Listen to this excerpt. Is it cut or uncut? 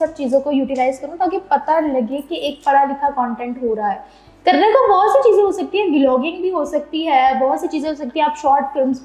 uncut